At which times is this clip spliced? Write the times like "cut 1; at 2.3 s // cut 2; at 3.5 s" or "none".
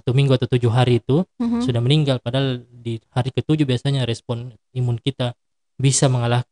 none

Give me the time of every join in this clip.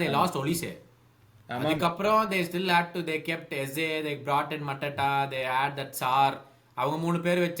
none

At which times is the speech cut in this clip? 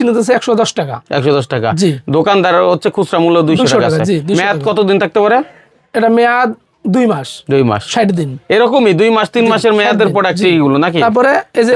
none

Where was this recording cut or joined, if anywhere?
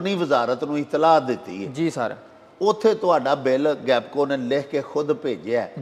none

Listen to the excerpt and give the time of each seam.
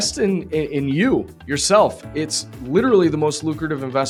none

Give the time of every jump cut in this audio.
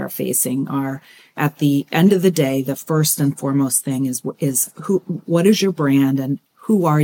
cut 1; at 1.4 s

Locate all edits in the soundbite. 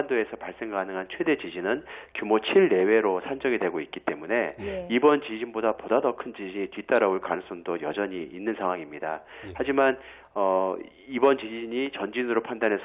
none

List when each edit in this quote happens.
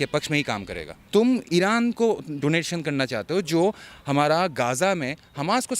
cut 1; at 0.9 s

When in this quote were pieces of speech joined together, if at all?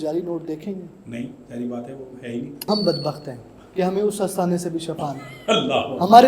cut 1; at 2.7 s

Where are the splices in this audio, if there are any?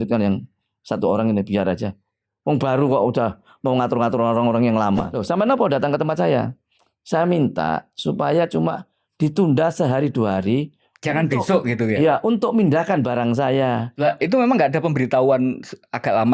cut 1; at 5.1 s // cut 2; at 13.9 s

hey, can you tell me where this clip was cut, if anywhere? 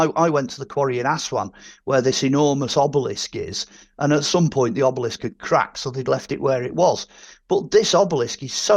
none

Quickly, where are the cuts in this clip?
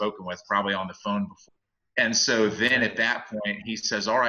cut 1; at 1.4 s

